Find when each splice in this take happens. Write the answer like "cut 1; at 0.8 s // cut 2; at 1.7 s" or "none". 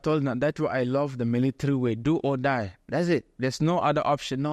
cut 1; at 2.8 s